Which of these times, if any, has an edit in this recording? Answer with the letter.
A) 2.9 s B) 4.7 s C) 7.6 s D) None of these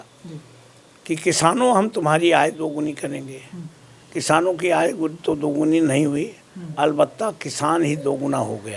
D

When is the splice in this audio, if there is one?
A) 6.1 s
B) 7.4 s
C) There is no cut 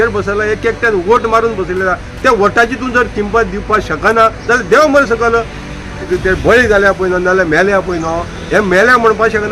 A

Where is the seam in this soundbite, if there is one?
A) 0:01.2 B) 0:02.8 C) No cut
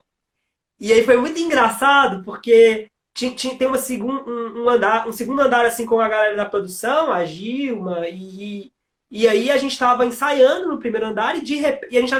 C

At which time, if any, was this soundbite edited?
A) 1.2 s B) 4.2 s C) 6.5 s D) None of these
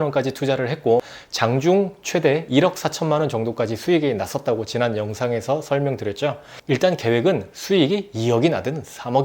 A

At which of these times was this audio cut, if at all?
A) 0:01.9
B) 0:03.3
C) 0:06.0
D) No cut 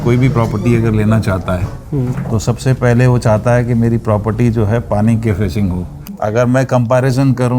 C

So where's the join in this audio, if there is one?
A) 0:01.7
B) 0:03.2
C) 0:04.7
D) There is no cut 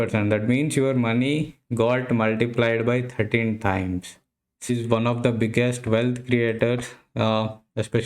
C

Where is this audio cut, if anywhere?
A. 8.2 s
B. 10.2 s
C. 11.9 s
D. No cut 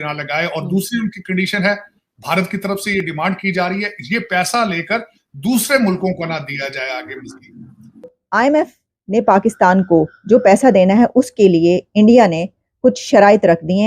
A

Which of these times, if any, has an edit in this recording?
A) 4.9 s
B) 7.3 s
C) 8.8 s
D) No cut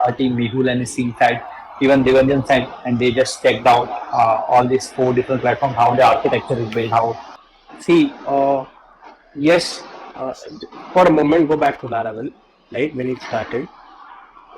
B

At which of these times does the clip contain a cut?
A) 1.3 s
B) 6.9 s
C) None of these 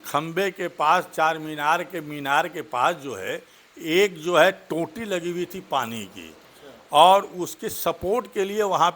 C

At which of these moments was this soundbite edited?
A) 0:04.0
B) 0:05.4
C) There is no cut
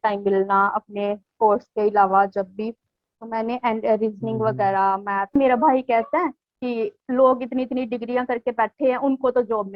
B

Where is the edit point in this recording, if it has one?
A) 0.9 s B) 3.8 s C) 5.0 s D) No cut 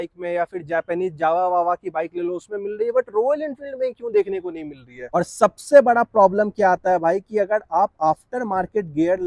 C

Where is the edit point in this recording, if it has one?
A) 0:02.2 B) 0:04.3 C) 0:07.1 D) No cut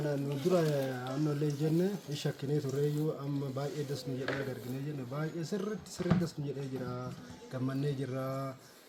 D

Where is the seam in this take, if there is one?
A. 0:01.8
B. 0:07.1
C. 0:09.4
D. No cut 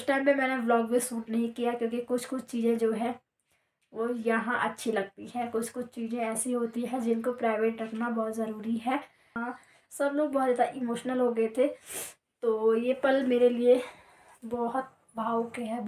C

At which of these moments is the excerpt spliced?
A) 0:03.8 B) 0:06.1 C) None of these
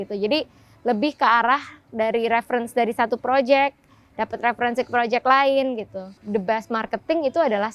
B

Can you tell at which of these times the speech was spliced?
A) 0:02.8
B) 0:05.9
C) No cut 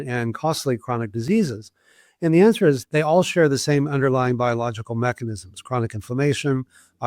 A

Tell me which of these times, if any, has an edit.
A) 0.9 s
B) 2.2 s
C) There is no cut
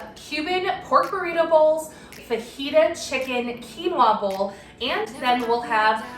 B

